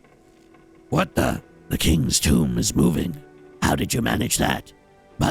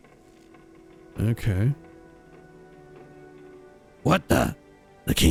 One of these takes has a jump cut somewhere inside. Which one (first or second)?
first